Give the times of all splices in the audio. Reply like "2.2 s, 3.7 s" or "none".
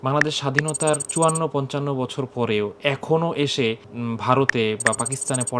1.1 s, 3.9 s